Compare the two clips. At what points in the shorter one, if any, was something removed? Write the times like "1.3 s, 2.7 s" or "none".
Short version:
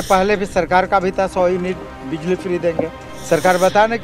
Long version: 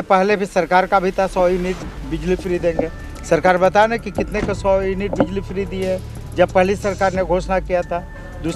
none